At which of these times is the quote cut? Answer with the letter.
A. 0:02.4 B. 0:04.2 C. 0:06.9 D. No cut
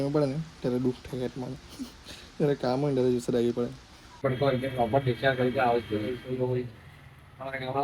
B